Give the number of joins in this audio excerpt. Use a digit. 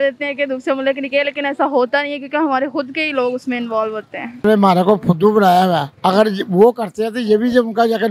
1